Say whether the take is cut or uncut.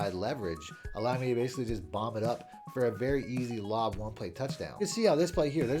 cut